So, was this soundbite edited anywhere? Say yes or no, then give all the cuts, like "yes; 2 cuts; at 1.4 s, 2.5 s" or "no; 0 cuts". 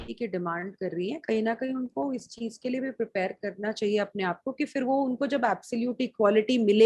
no; 0 cuts